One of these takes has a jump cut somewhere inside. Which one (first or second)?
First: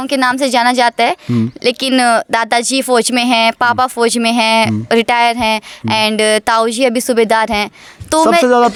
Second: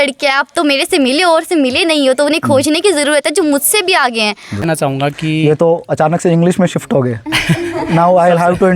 second